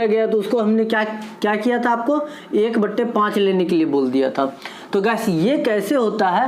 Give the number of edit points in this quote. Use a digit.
0